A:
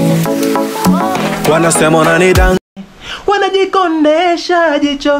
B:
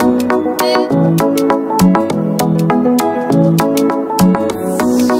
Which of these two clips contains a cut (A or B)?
A